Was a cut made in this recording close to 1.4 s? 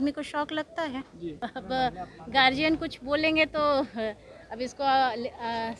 yes; 1 cut; at 1.4 s

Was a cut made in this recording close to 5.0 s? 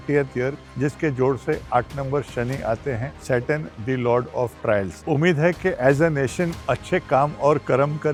no; 0 cuts

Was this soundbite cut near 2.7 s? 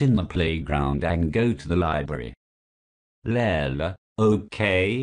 no; 0 cuts

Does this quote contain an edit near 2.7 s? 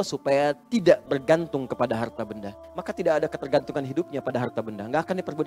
yes; 1 cut; at 2.7 s

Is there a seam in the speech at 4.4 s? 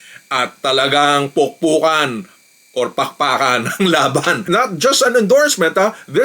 yes; 1 cut; at 4.4 s

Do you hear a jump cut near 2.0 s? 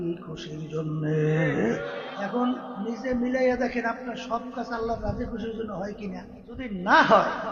yes; 2 cuts; at 2.0 s, 6.6 s

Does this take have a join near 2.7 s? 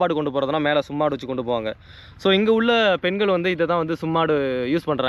no; 0 cuts

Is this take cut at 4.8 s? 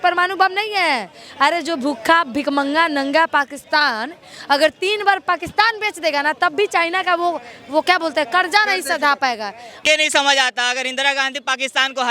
no; 1 cut; at 9.8 s

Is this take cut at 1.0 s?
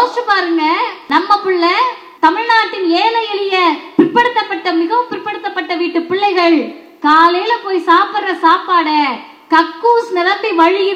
yes; 2 cuts; at 1.0 s, 2.0 s

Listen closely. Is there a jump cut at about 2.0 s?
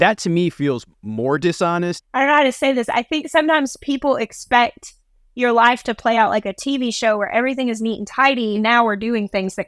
yes; 2 cuts; at 2.0 s, 8.6 s

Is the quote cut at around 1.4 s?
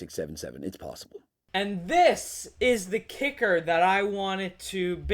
yes; 1 cut; at 1.4 s

